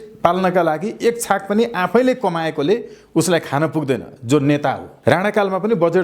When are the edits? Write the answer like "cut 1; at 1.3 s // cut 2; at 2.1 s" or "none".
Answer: cut 1; at 4.9 s